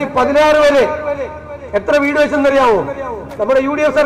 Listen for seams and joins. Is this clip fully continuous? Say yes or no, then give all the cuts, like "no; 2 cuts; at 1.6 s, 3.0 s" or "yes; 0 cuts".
yes; 0 cuts